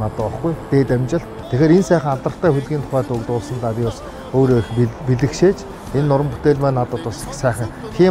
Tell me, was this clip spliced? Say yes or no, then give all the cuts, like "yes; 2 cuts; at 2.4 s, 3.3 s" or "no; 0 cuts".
yes; 1 cut; at 1.4 s